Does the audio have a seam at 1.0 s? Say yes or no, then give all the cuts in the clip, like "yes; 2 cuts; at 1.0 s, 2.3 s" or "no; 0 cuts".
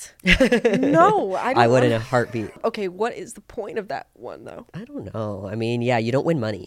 no; 2 cuts; at 2.6 s, 4.6 s